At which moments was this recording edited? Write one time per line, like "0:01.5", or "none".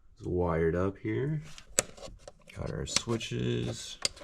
0:01.7